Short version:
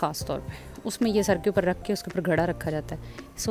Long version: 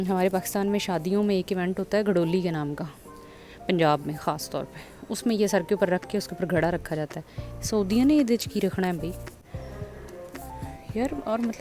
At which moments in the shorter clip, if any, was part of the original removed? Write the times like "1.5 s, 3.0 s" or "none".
none